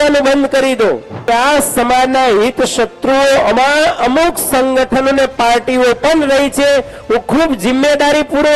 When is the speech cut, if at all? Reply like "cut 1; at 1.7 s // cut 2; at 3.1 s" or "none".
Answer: cut 1; at 1.1 s